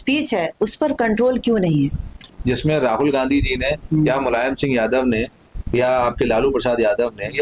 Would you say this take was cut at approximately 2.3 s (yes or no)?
yes